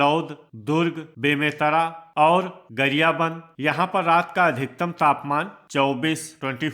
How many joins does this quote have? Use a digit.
2